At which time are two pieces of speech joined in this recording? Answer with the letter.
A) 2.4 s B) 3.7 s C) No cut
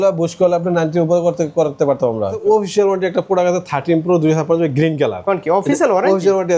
A